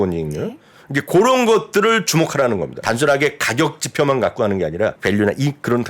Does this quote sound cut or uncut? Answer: cut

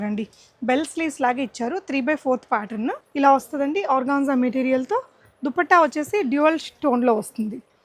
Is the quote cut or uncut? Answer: cut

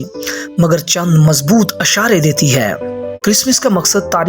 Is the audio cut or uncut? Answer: cut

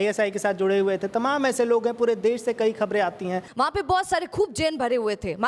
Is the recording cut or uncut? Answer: cut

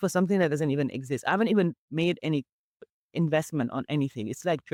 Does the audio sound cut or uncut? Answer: uncut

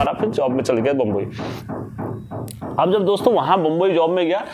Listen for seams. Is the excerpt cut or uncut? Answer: uncut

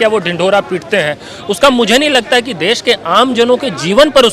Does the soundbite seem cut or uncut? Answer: uncut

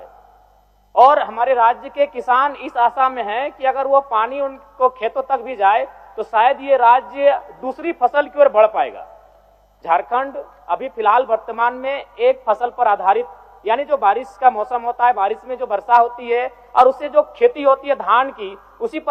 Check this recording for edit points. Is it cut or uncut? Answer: uncut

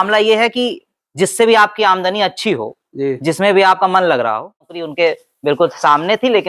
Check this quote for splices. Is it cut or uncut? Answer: cut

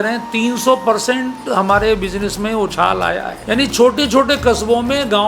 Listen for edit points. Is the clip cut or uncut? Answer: cut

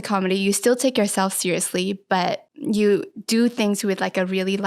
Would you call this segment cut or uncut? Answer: cut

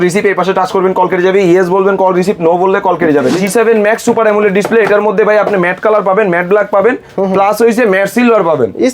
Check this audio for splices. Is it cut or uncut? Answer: cut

